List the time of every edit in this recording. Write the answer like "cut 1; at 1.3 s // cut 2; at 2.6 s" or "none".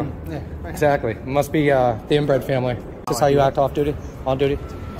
cut 1; at 3.0 s